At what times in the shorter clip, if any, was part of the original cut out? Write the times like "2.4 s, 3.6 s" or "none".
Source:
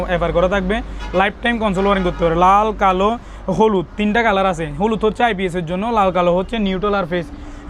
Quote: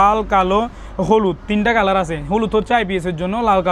none

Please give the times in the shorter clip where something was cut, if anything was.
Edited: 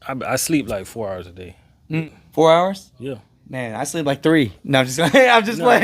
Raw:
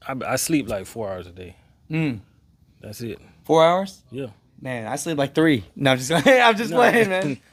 2.0 s

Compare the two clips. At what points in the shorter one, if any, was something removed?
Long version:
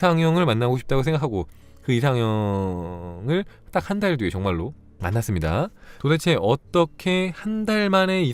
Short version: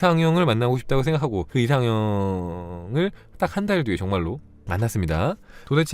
1.5 s

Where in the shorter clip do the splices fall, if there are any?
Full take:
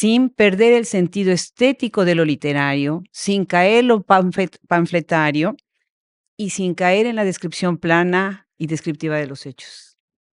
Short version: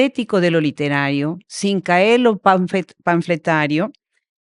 none

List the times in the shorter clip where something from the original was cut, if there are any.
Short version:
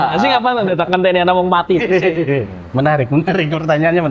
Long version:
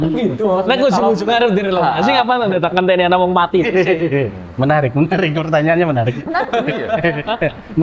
none

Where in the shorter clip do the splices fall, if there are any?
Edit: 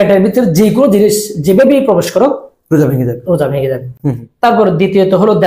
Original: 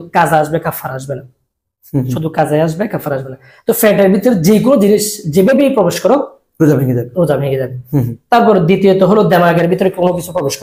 none

